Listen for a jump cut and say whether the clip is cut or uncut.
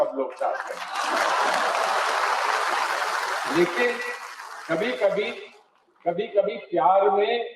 uncut